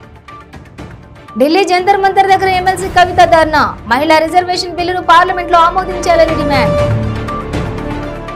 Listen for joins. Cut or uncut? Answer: uncut